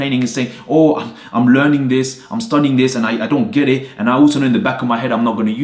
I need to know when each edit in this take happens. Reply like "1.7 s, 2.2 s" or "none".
none

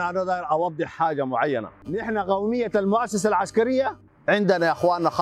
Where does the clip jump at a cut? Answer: 1.8 s

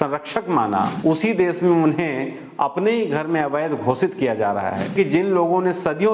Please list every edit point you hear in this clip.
0.9 s, 4.9 s

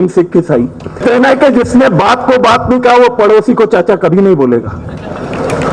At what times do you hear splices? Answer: 1.0 s

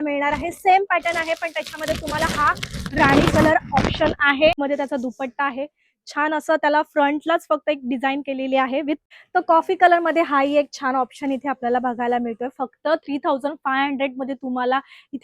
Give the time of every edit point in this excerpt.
4.6 s, 9.0 s

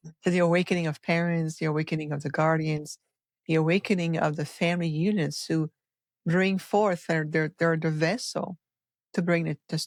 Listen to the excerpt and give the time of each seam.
none

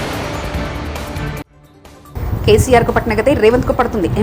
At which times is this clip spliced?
none

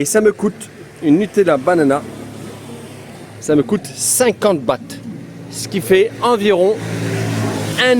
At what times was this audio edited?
none

